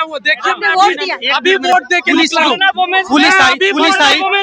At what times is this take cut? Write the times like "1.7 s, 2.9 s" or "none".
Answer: none